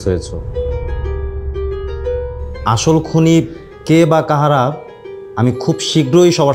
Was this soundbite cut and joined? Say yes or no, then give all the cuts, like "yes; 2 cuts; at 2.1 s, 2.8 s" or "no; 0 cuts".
no; 0 cuts